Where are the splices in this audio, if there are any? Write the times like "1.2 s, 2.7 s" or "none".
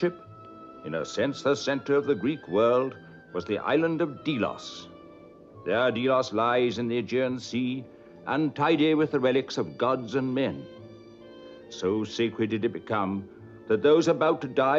2.3 s